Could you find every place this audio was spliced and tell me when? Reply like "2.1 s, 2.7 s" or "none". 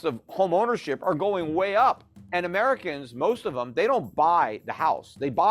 2.1 s